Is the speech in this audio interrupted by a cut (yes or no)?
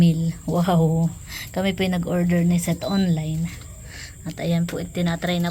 no